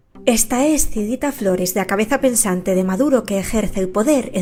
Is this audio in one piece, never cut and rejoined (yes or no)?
yes